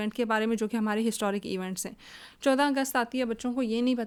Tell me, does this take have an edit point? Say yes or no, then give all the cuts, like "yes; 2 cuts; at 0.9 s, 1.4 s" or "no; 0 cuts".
no; 0 cuts